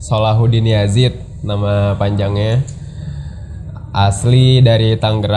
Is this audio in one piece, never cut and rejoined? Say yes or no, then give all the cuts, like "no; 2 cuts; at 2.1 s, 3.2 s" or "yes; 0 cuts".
yes; 0 cuts